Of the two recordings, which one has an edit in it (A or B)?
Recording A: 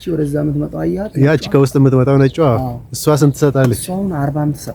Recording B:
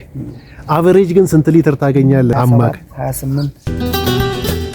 B